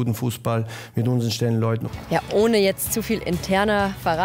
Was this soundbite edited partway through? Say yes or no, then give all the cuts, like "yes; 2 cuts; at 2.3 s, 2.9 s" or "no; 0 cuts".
yes; 1 cut; at 1.9 s